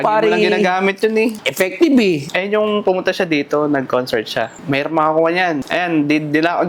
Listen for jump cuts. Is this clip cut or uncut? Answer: cut